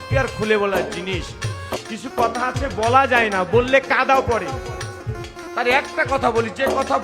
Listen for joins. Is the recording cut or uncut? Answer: cut